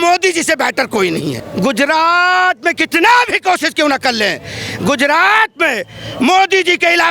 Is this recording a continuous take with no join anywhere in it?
no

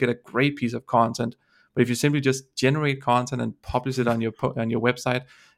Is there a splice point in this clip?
no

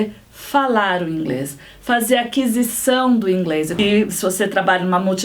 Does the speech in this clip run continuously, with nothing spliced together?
no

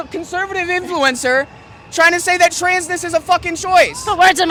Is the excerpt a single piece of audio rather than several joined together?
yes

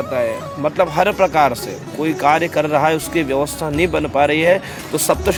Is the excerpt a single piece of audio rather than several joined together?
yes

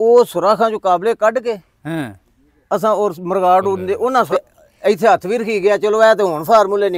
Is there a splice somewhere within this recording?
yes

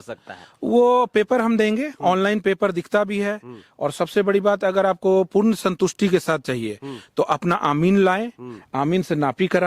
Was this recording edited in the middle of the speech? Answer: no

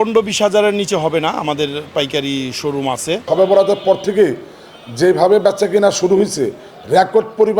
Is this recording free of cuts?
no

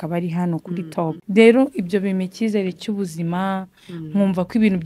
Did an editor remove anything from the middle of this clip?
yes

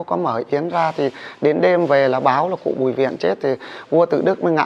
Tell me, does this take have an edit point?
no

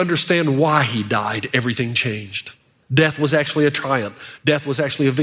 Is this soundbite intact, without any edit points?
yes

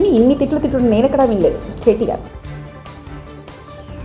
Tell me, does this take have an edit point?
no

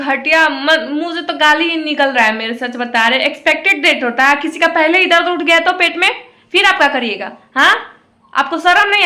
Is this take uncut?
yes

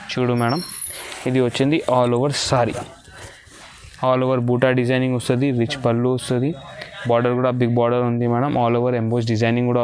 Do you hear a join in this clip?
no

